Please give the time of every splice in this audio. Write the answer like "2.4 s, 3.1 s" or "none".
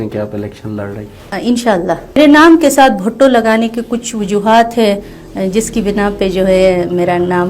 2.2 s